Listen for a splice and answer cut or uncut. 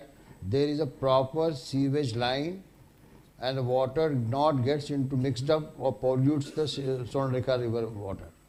uncut